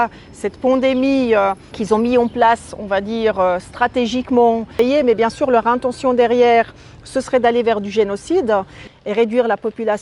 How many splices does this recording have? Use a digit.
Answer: 3